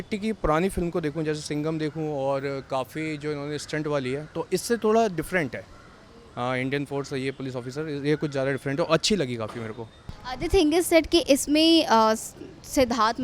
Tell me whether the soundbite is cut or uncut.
uncut